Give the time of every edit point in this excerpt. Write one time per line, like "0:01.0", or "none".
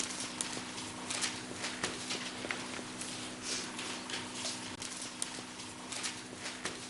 0:04.8